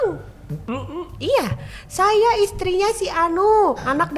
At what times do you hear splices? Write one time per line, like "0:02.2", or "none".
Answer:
none